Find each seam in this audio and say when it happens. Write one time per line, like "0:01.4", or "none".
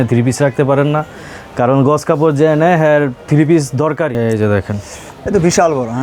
0:04.2